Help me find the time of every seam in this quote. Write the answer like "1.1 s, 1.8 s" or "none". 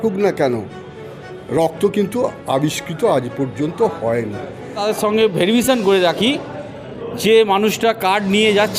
4.8 s